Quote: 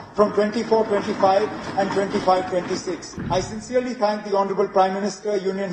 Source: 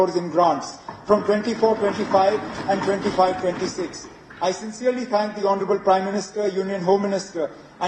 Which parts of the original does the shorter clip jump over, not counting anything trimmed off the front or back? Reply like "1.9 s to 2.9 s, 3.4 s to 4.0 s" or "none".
4.0 s to 4.2 s